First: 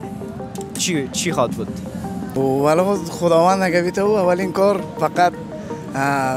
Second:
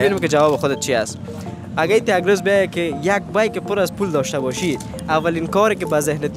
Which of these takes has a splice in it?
first; 1 cut; at 2.3 s

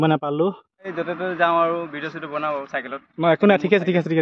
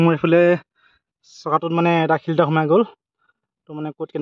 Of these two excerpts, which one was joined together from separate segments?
first; 1 cut; at 1.0 s

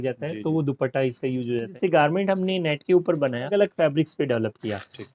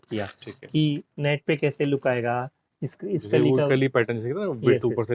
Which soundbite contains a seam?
first; 2 cuts; at 1.7 s, 3.5 s

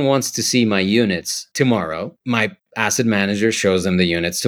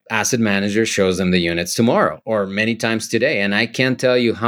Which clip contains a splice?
first; 1 cut; at 1.7 s

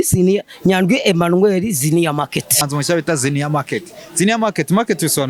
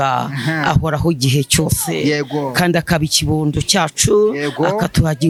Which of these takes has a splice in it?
first; 1 cut; at 2.6 s

